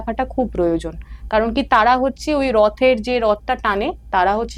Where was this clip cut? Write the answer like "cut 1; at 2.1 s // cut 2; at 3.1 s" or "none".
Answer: none